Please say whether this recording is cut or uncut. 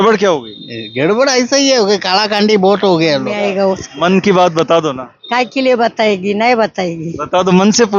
cut